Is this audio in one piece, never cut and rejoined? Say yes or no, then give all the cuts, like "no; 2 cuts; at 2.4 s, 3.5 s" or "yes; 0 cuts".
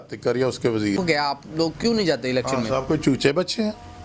no; 1 cut; at 1.0 s